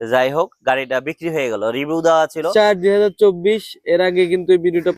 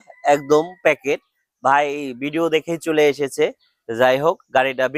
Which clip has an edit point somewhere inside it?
first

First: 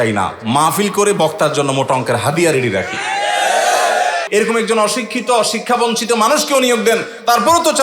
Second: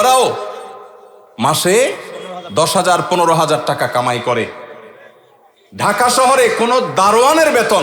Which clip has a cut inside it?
first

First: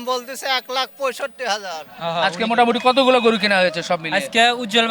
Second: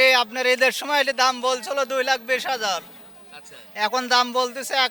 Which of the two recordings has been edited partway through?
first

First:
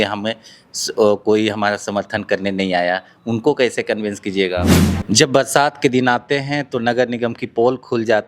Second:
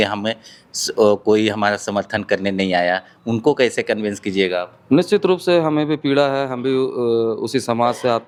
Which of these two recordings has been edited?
first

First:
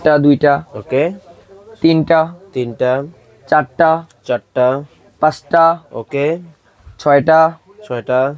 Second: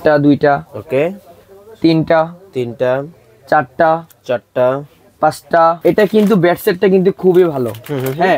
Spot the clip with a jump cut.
second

